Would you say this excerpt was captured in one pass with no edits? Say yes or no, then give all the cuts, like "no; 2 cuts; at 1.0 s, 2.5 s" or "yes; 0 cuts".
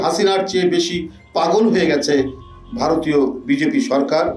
yes; 0 cuts